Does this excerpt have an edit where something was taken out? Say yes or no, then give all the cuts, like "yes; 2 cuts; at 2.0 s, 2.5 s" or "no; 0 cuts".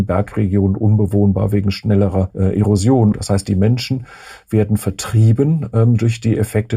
yes; 2 cuts; at 2.3 s, 3.2 s